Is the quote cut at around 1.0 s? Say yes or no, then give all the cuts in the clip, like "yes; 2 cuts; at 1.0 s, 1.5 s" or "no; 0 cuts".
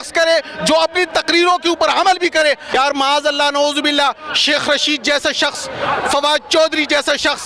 no; 1 cut; at 2.7 s